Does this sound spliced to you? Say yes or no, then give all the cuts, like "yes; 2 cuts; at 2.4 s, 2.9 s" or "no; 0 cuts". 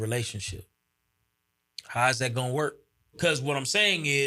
yes; 1 cut; at 3.2 s